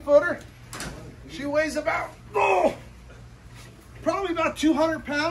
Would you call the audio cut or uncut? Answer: uncut